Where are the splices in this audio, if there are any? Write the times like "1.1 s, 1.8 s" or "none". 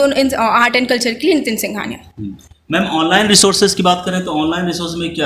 none